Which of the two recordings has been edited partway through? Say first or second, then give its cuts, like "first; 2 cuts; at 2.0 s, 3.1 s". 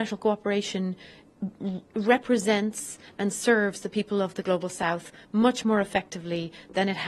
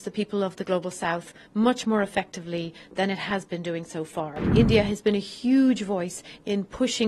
second; 1 cut; at 4.4 s